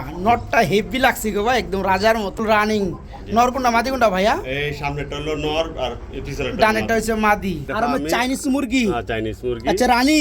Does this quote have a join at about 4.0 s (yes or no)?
no